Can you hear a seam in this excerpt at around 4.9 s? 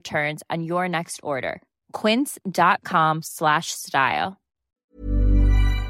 yes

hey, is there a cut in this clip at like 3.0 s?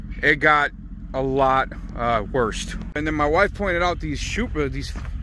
yes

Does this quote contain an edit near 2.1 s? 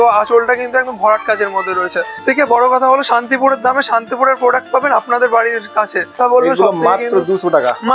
yes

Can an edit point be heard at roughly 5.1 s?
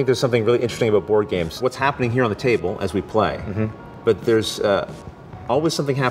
no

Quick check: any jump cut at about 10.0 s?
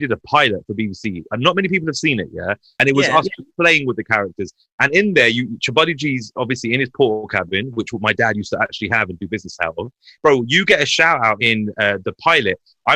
yes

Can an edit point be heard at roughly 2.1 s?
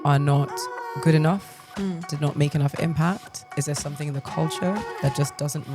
yes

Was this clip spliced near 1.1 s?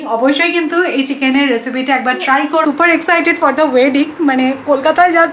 no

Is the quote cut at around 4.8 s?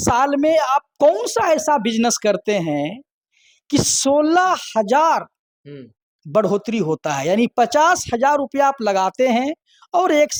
no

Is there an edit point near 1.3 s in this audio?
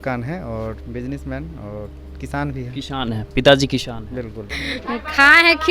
no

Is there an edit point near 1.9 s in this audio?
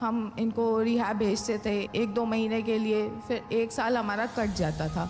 yes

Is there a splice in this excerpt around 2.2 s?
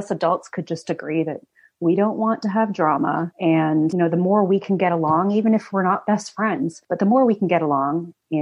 no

